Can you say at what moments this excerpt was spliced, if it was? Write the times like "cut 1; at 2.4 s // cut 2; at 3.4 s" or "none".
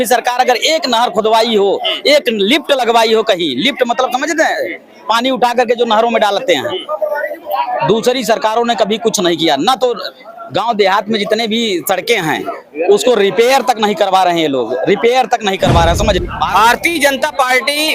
cut 1; at 16.2 s